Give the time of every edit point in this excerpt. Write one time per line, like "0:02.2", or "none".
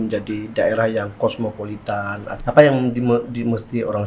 0:02.3